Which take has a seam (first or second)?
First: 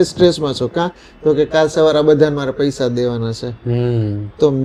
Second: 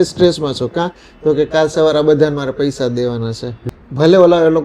second